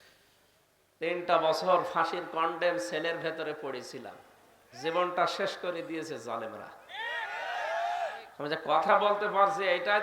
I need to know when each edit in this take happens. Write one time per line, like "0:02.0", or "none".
0:01.0